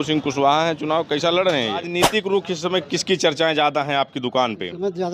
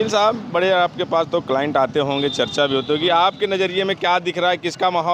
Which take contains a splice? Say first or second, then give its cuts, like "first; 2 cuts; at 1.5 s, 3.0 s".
first; 1 cut; at 1.9 s